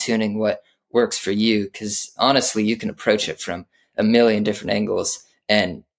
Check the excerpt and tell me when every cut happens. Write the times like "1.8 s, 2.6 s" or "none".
none